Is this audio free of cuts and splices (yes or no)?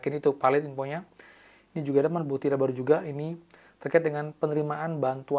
yes